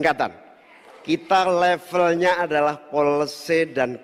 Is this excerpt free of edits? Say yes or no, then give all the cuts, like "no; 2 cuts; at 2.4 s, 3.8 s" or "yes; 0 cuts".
yes; 0 cuts